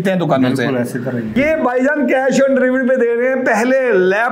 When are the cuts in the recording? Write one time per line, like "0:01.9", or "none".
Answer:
0:01.4